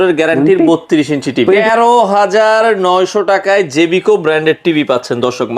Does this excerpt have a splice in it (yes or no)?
yes